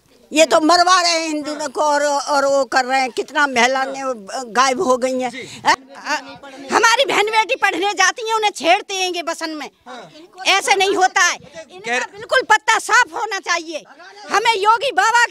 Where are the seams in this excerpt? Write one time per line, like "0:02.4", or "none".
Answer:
0:05.8